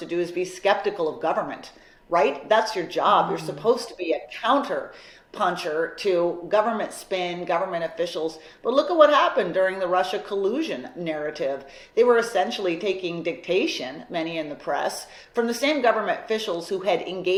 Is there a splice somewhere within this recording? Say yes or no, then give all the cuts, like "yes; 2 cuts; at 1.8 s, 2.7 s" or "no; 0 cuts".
no; 0 cuts